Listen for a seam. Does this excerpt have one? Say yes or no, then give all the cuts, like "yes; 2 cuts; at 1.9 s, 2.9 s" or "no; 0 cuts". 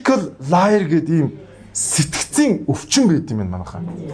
no; 0 cuts